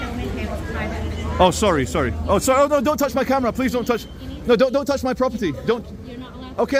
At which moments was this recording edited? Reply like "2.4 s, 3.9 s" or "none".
none